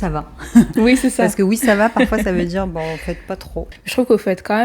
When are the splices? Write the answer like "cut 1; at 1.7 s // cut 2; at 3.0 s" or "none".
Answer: cut 1; at 3.7 s